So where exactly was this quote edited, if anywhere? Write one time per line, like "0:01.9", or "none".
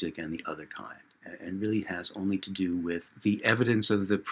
0:03.1